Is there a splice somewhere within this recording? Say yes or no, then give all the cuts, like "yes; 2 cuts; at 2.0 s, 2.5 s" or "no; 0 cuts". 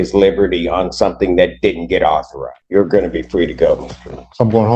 no; 0 cuts